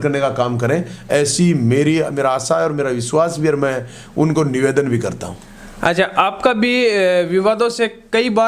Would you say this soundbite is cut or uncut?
uncut